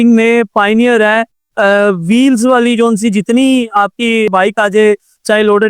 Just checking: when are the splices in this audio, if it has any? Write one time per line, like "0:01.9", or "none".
0:04.3